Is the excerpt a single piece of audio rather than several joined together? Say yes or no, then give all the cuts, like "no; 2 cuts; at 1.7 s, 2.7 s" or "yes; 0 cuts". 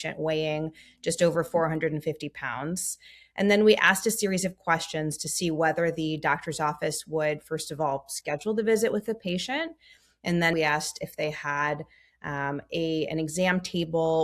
no; 1 cut; at 10.5 s